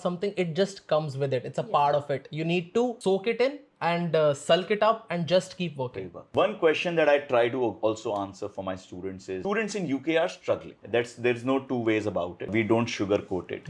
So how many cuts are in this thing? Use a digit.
0